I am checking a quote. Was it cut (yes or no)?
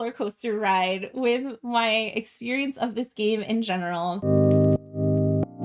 yes